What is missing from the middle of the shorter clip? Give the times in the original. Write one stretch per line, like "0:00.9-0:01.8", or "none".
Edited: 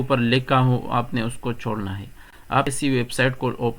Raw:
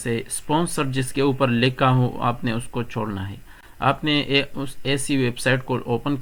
0:04.0-0:05.0